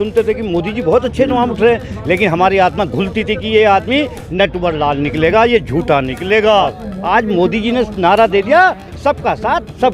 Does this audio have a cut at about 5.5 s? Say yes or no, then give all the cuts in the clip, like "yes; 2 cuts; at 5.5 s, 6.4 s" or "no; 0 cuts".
no; 1 cut; at 6.8 s